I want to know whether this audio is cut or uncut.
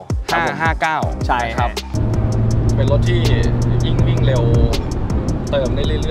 cut